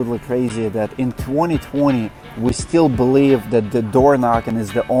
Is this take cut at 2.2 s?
no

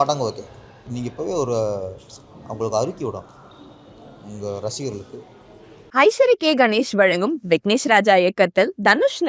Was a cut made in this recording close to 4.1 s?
no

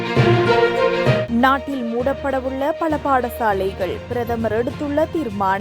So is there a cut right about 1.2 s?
yes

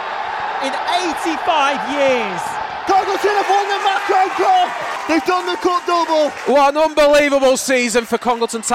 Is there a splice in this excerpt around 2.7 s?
yes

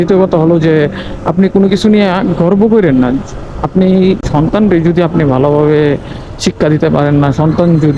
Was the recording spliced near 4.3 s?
yes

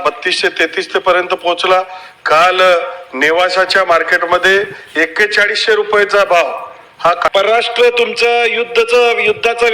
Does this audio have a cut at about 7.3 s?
yes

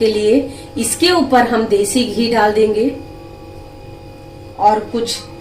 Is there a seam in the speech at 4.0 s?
yes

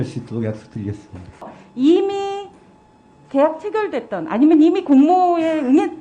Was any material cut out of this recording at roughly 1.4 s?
yes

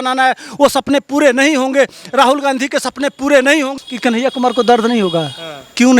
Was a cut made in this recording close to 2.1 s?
no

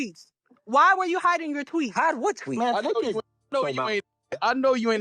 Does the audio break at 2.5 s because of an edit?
yes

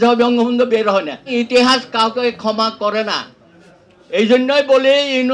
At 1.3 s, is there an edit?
yes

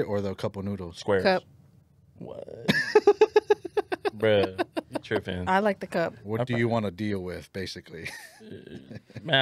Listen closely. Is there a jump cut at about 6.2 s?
yes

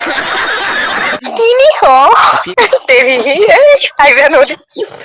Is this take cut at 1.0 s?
yes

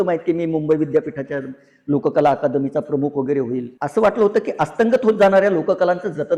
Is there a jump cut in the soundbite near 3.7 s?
yes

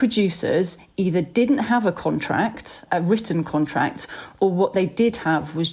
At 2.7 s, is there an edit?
yes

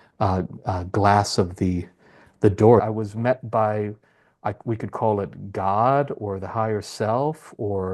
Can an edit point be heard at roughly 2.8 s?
yes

